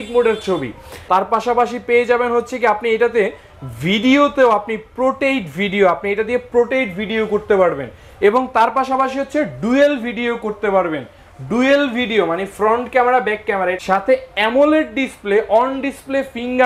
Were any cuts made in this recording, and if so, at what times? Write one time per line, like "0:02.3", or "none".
0:00.9
0:13.8